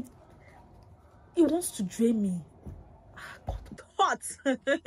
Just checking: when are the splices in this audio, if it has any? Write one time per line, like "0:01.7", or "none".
0:03.8